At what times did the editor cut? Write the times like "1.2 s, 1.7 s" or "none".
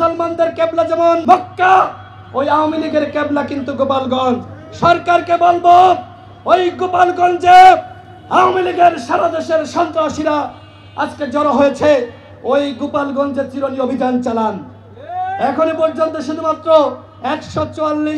1.2 s